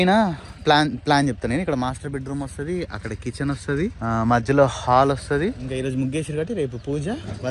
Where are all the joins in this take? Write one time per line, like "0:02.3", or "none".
0:04.0
0:05.7

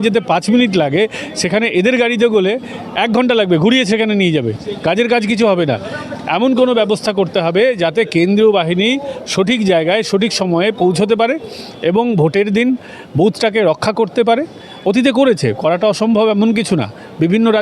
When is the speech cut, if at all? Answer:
none

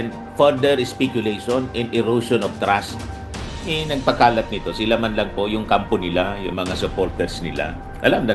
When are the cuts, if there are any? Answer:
none

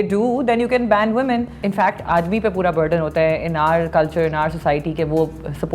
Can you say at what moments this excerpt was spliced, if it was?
0:01.6

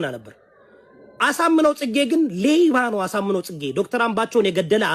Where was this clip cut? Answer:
none

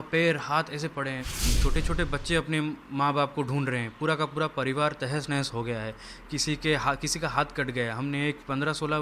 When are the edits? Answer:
0:01.5

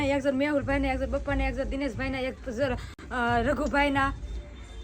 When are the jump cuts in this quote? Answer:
none

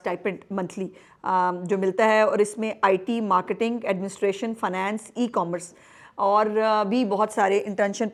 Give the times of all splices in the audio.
none

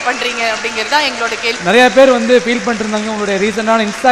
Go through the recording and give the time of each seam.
0:01.5

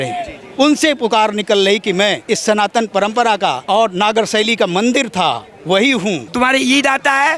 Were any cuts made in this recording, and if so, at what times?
0:02.2
0:03.6
0:06.2

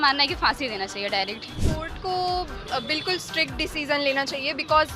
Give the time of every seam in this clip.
0:01.5

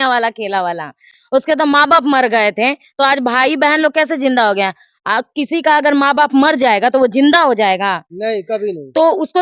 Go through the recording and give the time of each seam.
none

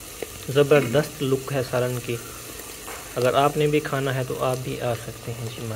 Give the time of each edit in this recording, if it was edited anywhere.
none

